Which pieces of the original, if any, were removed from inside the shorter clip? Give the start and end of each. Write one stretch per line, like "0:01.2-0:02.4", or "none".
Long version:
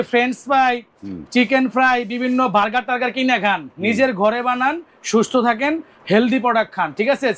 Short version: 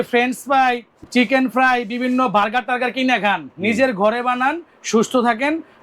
0:00.9-0:01.1